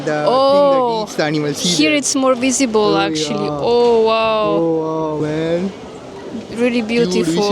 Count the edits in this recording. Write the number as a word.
one